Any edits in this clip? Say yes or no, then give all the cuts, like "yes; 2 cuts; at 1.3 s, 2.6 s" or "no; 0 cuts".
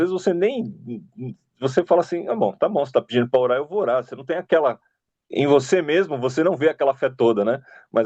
yes; 1 cut; at 4.9 s